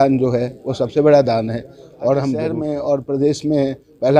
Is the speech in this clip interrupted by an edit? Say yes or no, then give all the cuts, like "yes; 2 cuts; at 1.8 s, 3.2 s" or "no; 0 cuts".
yes; 1 cut; at 2.6 s